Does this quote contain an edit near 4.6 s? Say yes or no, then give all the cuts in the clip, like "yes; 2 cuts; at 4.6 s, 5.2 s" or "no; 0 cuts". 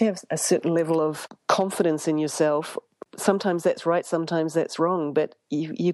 no; 2 cuts; at 1.3 s, 3.0 s